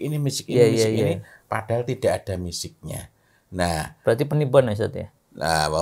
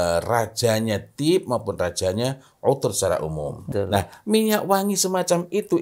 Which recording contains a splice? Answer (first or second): second